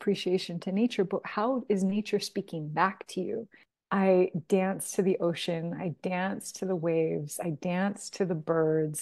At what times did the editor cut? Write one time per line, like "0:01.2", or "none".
0:03.5